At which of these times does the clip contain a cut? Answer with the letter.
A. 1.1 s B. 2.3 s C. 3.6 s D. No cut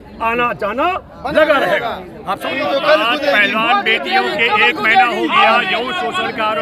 B